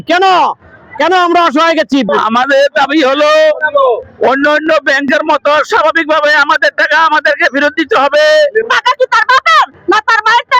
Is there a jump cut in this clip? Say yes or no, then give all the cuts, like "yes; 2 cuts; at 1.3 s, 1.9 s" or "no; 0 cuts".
yes; 2 cuts; at 2.1 s, 8.6 s